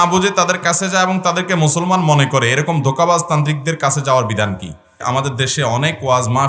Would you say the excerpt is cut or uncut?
cut